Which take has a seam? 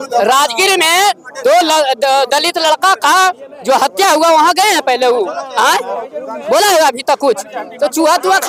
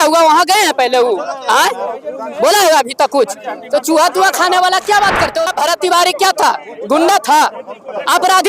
second; 1 cut; at 5.5 s

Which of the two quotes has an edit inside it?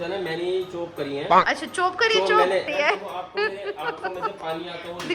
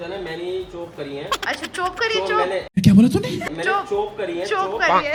first; 1 cut; at 2.7 s

